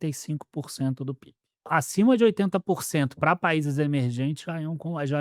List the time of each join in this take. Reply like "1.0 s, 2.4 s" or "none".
1.7 s